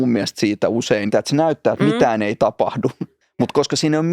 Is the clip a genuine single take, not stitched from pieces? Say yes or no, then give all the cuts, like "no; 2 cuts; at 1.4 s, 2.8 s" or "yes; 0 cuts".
no; 2 cuts; at 1.1 s, 3.1 s